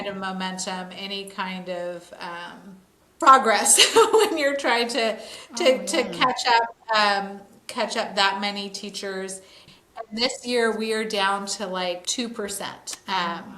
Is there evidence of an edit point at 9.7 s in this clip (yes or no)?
yes